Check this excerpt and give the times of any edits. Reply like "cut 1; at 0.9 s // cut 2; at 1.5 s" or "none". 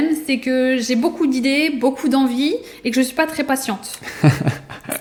none